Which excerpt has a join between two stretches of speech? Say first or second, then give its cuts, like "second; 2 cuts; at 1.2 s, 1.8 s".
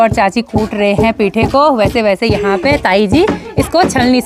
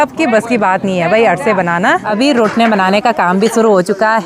second; 1 cut; at 2.0 s